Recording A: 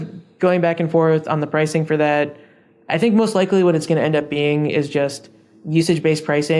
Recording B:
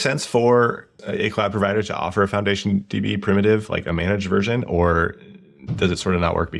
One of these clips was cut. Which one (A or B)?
B